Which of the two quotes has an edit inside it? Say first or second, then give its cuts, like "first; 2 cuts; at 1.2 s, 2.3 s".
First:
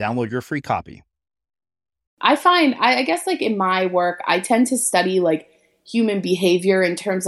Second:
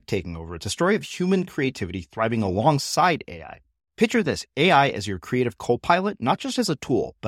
first; 1 cut; at 2.0 s